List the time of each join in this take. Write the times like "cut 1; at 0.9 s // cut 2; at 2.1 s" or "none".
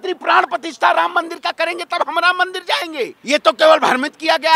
cut 1; at 3.2 s